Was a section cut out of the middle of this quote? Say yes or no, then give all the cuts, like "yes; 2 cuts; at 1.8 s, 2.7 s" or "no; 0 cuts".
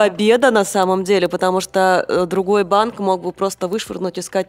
no; 0 cuts